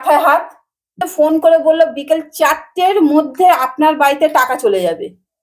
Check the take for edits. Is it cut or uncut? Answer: cut